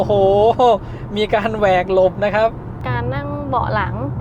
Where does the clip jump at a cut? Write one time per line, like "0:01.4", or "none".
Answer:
0:02.8